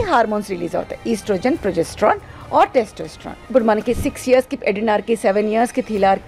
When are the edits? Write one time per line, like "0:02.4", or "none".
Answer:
0:03.4